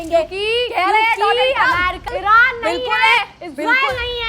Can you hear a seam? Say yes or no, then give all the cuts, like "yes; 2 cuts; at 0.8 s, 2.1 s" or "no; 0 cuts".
yes; 1 cut; at 2.0 s